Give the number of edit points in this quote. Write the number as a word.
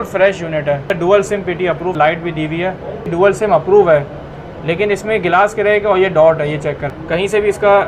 four